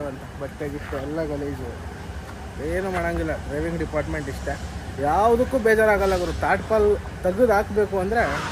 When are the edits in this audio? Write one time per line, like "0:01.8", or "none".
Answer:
none